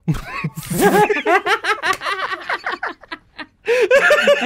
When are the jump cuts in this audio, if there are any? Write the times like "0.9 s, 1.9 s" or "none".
none